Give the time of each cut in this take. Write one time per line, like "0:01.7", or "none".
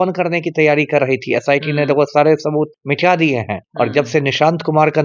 none